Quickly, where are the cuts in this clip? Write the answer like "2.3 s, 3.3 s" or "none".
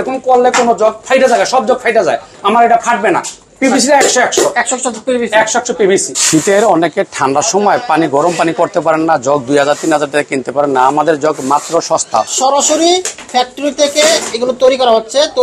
1.0 s, 6.2 s, 12.3 s

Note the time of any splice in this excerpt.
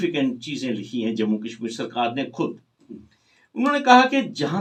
none

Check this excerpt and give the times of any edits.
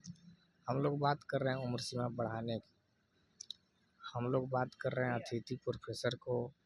none

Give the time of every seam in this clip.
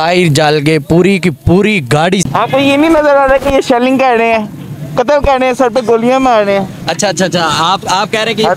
2.3 s

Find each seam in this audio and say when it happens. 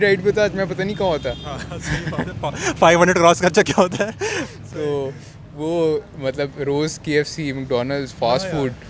none

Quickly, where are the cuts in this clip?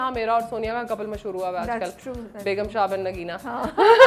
none

